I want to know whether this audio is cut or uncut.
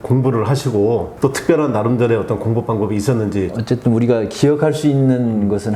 uncut